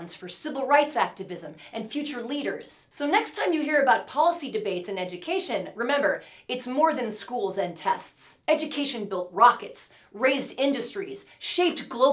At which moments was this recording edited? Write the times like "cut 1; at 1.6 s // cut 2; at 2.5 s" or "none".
none